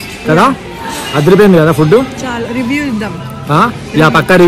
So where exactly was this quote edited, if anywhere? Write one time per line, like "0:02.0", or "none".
none